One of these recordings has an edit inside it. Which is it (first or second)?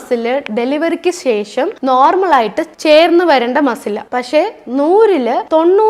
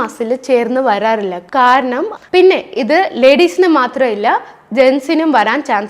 second